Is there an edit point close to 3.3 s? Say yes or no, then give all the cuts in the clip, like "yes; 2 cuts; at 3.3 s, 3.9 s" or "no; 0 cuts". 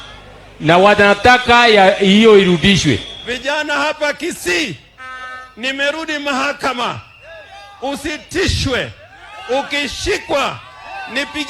yes; 1 cut; at 3.3 s